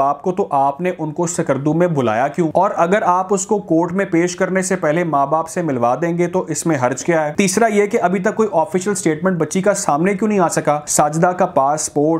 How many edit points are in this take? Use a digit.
3